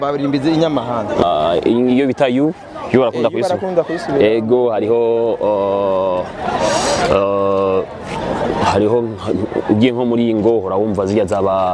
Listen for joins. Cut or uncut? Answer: cut